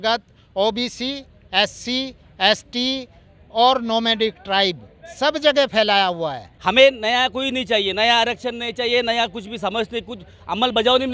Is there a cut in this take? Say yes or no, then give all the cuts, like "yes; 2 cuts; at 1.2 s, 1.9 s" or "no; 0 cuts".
yes; 1 cut; at 6.5 s